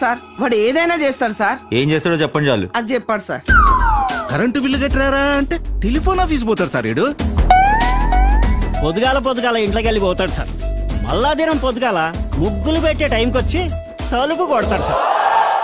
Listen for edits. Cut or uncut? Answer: cut